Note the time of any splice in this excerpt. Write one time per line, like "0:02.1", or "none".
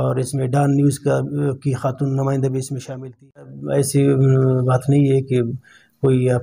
0:03.6

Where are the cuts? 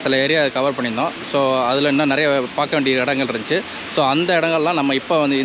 none

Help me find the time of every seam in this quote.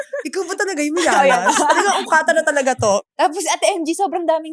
0:03.0

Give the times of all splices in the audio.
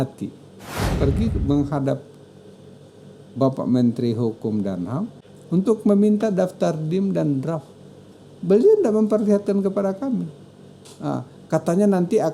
0:00.9
0:05.2

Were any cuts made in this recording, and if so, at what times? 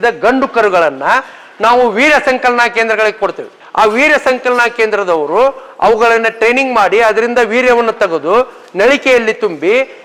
none

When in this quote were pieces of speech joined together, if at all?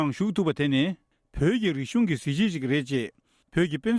none

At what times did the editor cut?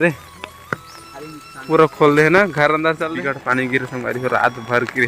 0:03.0

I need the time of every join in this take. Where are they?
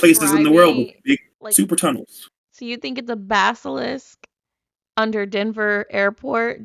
0:01.4

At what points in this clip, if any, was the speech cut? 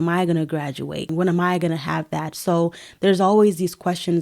0:01.1

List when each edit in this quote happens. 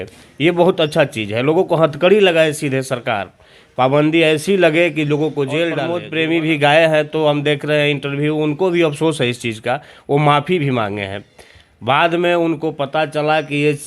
0:06.0

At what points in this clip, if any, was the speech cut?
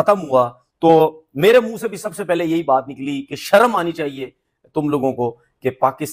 none

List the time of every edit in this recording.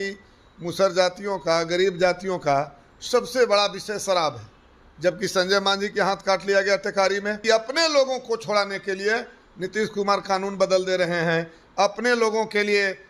0:07.5

